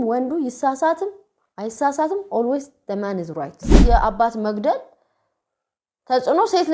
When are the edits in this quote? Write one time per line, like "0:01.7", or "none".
0:03.8